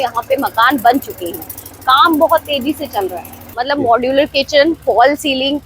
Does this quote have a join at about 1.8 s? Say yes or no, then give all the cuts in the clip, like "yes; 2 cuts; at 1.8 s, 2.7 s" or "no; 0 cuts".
no; 1 cut; at 3.5 s